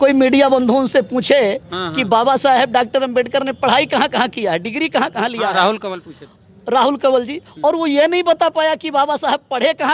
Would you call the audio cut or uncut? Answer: uncut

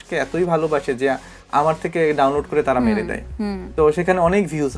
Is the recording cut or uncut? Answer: uncut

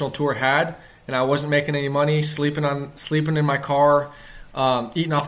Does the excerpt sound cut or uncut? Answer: uncut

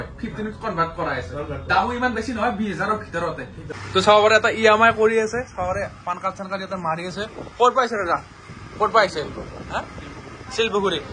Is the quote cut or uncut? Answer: cut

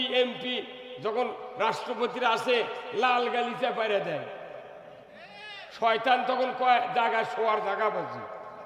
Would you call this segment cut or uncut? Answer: uncut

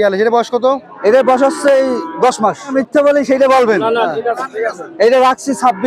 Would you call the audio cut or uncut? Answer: cut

